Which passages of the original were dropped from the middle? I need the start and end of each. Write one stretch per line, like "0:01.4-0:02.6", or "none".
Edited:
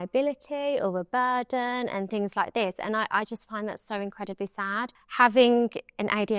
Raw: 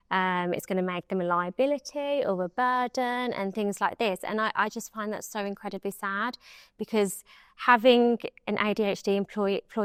0:06.4-0:07.5